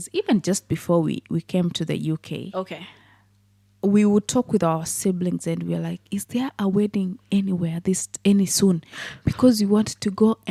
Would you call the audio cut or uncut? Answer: uncut